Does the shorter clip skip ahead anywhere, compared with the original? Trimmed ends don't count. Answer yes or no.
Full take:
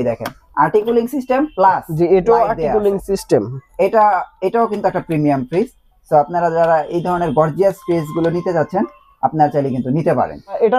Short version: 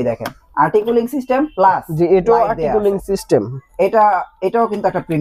no